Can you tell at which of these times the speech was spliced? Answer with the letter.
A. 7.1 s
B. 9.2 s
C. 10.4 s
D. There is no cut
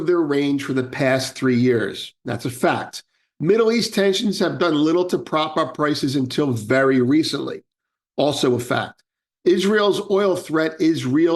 D